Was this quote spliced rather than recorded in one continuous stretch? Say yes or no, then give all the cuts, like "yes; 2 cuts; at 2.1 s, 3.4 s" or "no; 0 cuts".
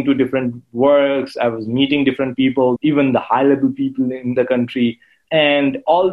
yes; 3 cuts; at 2.8 s, 4.3 s, 5.1 s